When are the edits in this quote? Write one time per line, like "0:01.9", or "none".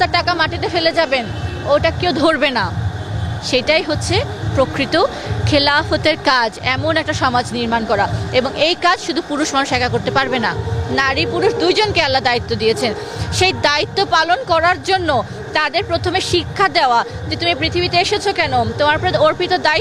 none

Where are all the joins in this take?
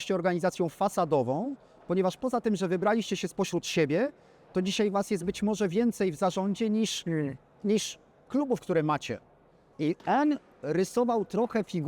0:09.6

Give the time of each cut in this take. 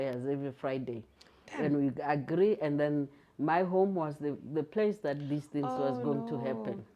none

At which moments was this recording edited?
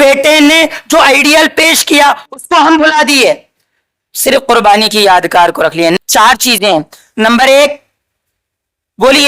0:06.0

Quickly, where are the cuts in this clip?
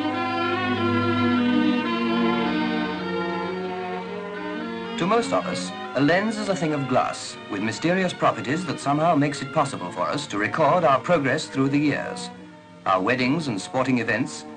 none

